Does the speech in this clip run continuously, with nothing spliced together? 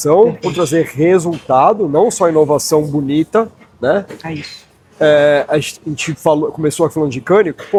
yes; 0 cuts

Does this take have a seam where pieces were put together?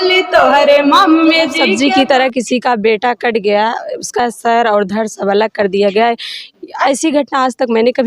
yes; 1 cut; at 1.6 s

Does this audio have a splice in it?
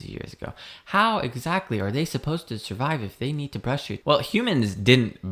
yes; 1 cut; at 3.9 s

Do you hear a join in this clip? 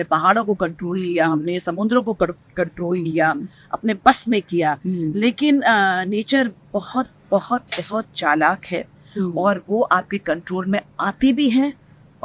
no; 0 cuts

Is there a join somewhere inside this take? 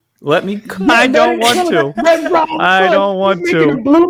no; 0 cuts

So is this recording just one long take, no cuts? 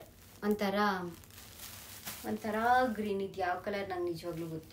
yes; 0 cuts

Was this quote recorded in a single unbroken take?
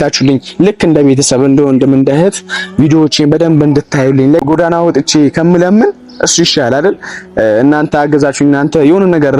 no; 1 cut; at 4.4 s

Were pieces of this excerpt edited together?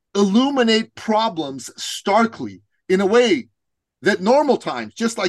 no; 0 cuts

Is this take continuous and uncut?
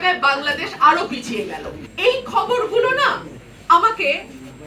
no; 1 cut; at 1.8 s

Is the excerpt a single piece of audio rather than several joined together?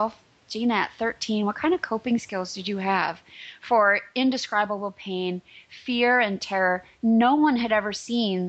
yes; 0 cuts

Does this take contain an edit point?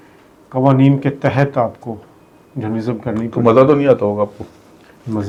no; 0 cuts

